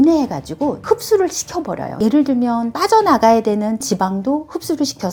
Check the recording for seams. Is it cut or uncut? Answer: uncut